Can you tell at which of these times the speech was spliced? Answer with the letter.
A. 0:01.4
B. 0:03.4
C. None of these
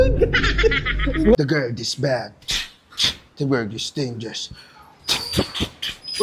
A